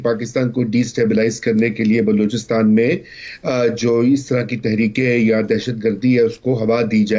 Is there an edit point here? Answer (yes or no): no